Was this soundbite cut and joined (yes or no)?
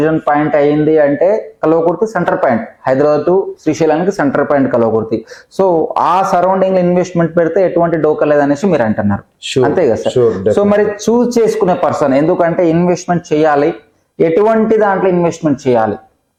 no